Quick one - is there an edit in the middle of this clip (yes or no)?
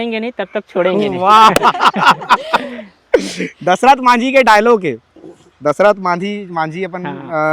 no